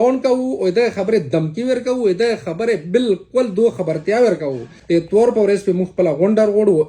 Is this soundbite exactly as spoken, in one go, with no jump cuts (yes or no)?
no